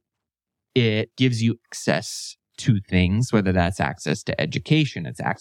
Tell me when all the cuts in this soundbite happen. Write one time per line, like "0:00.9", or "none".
0:01.4